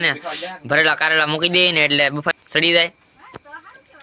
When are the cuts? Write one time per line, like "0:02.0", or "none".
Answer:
0:02.3